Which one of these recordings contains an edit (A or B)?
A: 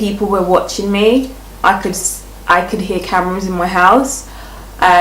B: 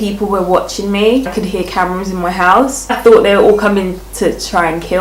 B